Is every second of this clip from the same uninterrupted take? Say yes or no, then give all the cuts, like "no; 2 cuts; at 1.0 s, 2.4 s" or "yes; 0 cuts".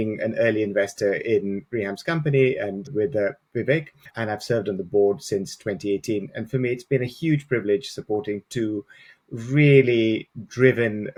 yes; 0 cuts